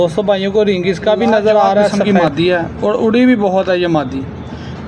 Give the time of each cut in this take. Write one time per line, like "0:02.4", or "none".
0:02.0